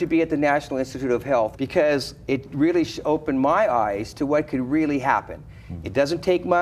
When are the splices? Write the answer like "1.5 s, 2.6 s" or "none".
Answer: 1.6 s